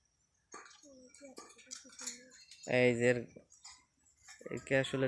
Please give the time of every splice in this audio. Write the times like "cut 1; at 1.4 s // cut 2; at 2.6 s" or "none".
none